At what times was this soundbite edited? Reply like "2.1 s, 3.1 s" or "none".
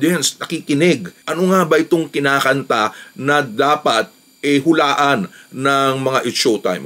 none

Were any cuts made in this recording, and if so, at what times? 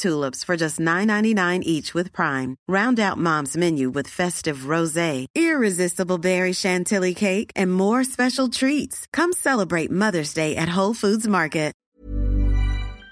11.9 s

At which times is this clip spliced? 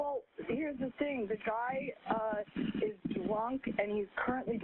none

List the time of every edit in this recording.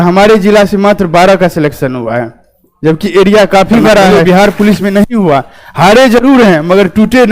4.1 s

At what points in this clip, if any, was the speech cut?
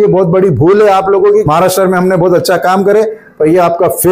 1.4 s

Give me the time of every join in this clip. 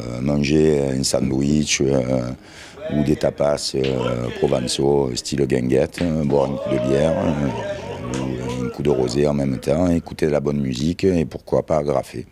1.4 s

